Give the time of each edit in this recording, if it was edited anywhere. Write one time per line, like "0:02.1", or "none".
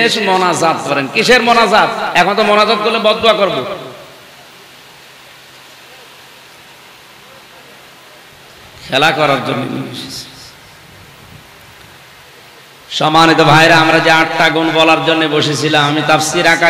0:08.3